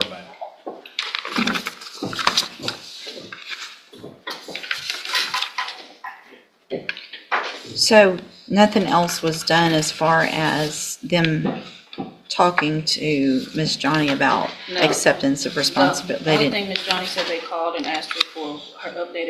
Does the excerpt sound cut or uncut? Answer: uncut